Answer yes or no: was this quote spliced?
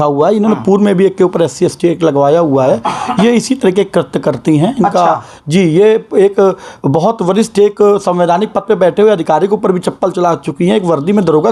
no